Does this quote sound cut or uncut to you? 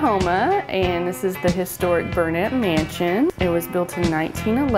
cut